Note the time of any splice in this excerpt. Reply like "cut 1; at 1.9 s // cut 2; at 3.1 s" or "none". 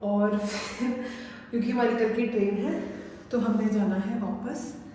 none